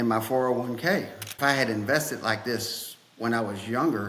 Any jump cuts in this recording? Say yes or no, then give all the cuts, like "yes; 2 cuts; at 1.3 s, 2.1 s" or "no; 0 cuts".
yes; 1 cut; at 1.2 s